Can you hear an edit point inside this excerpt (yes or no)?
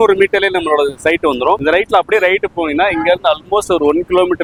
no